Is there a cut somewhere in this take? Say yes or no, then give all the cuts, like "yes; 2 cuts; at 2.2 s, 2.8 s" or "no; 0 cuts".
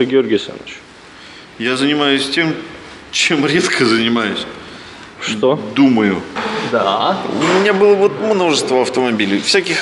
yes; 1 cut; at 6.4 s